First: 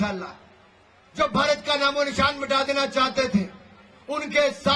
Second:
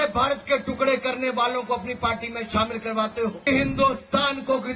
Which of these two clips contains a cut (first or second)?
second